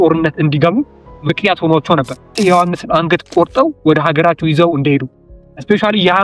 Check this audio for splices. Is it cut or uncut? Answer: cut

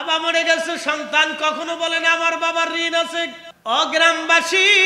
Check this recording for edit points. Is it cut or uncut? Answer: cut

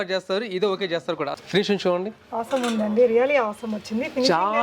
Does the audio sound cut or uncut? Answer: cut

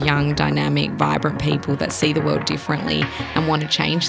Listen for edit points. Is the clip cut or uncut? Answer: uncut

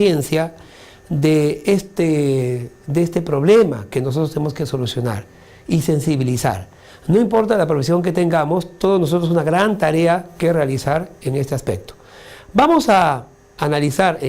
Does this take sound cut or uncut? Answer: cut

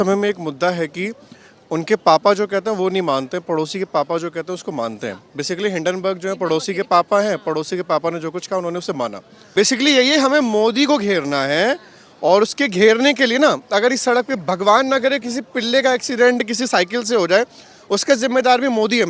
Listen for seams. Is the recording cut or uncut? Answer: cut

